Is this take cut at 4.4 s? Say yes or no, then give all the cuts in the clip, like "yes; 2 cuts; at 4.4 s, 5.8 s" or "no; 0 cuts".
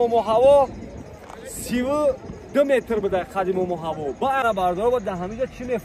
yes; 1 cut; at 4.4 s